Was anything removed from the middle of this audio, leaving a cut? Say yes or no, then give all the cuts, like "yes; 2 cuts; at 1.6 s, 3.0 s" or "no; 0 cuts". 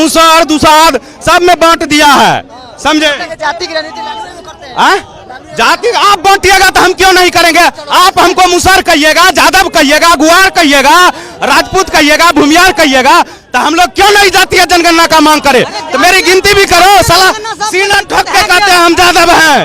no; 0 cuts